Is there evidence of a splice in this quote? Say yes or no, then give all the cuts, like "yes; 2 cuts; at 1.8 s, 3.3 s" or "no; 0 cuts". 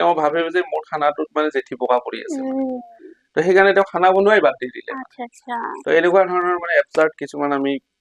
no; 0 cuts